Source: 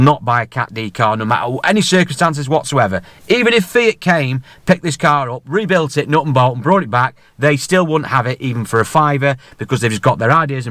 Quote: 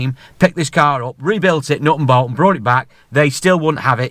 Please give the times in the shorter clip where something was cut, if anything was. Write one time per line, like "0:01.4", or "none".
none